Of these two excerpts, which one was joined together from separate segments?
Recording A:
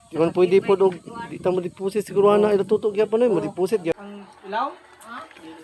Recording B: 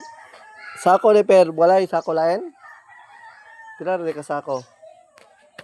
A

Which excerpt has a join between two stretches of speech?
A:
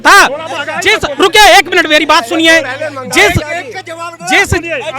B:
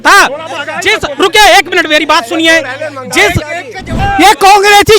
B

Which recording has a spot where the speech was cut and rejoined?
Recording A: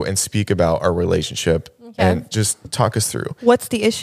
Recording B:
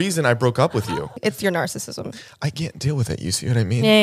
B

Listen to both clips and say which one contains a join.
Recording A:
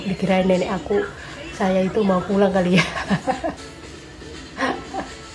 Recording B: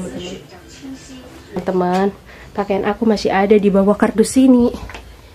B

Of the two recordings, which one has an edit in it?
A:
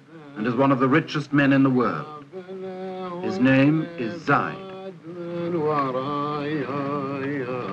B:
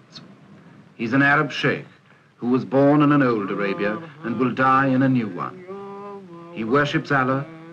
A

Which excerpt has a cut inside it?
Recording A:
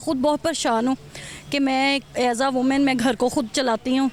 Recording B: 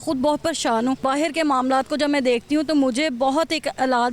B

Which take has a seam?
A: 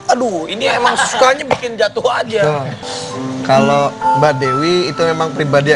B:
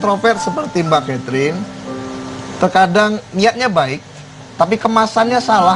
A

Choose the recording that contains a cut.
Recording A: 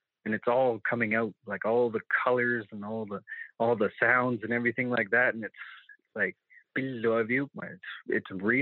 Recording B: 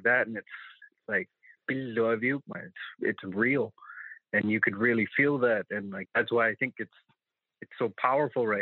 B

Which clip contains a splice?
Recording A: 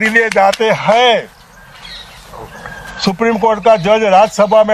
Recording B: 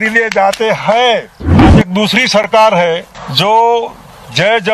B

